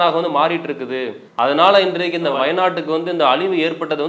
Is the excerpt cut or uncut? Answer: uncut